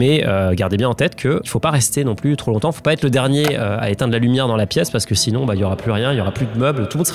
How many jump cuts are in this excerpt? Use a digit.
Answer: 0